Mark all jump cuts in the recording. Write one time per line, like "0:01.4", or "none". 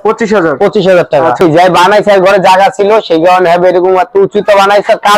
0:01.4